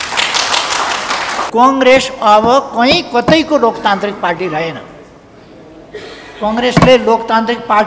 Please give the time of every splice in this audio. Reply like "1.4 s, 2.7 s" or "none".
1.4 s